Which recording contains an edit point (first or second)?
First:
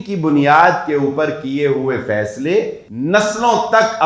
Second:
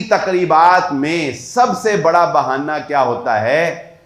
first